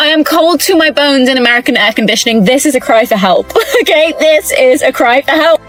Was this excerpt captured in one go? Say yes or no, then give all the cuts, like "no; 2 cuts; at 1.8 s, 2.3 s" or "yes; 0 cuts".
yes; 0 cuts